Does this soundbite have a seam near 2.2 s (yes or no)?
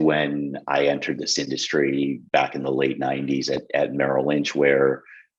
yes